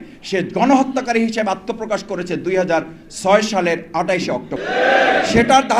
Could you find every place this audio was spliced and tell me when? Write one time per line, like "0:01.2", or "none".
0:04.5